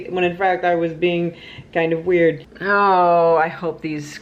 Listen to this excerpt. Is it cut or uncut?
uncut